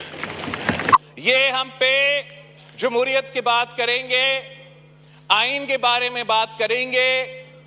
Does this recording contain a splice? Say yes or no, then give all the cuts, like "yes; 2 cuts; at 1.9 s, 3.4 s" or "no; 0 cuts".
yes; 1 cut; at 1.0 s